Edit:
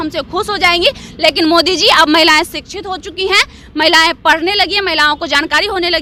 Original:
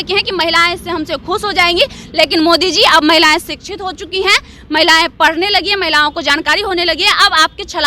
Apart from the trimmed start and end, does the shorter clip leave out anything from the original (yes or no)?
no